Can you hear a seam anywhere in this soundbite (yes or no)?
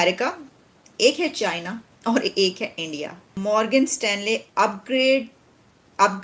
yes